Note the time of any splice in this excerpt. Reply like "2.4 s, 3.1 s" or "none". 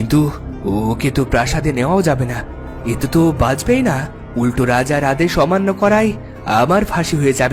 none